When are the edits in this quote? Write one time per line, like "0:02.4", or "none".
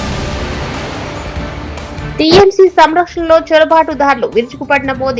0:02.0